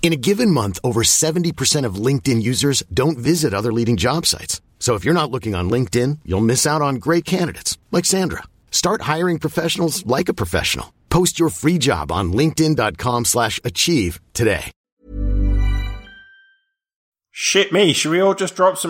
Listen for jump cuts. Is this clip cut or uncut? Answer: cut